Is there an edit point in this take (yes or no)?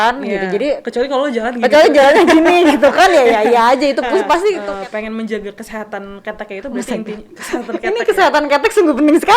yes